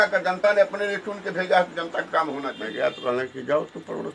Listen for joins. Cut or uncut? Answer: cut